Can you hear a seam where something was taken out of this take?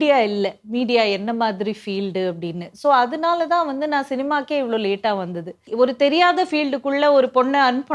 yes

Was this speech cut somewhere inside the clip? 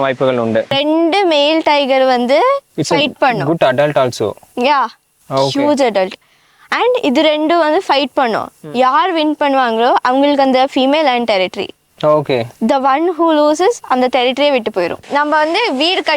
yes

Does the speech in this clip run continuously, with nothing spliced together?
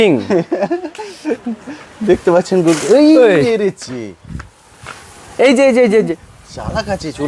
yes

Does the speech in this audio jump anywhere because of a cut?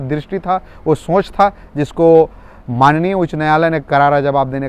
no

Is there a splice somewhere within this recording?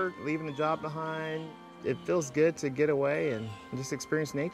yes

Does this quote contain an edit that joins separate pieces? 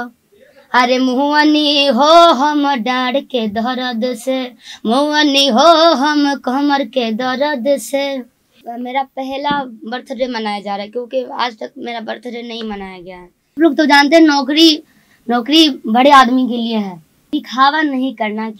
yes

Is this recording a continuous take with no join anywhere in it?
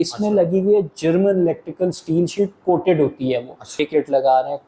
no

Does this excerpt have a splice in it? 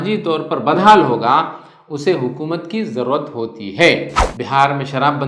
yes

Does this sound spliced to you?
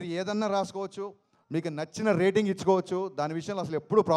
no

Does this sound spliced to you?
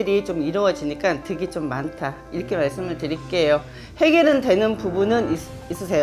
no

